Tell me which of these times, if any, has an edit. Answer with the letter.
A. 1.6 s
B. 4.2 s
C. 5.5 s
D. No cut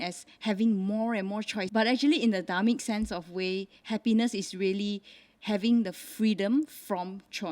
A